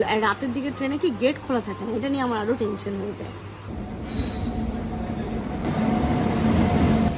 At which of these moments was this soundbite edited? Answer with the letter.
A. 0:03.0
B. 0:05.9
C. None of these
C